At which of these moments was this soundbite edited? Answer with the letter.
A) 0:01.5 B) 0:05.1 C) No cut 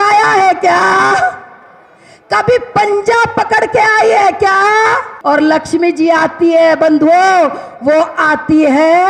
B